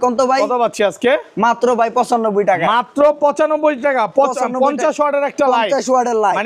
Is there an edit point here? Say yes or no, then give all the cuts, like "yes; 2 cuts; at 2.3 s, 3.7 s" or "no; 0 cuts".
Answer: no; 0 cuts